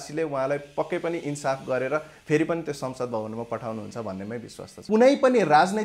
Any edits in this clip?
yes; 1 cut; at 4.8 s

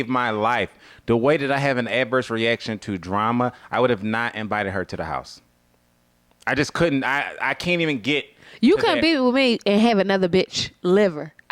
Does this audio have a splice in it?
no; 0 cuts

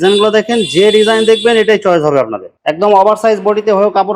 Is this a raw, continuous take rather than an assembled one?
yes; 0 cuts

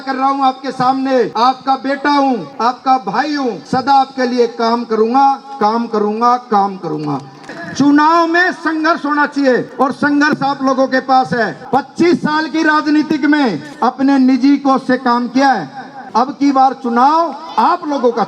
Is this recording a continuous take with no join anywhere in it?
no; 9 cuts; at 1.3 s, 2.5 s, 3.6 s, 7.4 s, 9.7 s, 11.6 s, 13.7 s, 15.9 s, 17.4 s

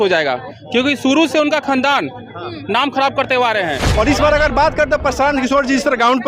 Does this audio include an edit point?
yes; 1 cut; at 3.8 s

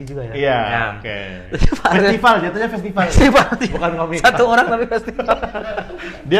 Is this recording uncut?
yes; 0 cuts

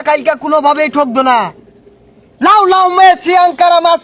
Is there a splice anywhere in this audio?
no; 0 cuts

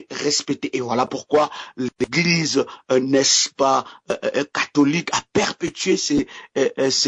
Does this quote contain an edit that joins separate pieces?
no; 0 cuts

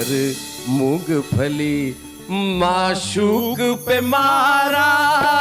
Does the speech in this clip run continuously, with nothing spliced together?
yes; 0 cuts

